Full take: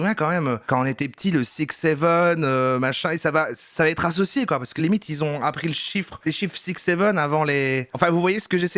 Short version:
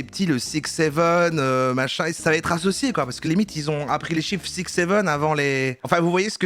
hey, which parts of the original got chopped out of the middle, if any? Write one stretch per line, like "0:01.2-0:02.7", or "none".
0:03.2-0:03.6
0:05.7-0:06.2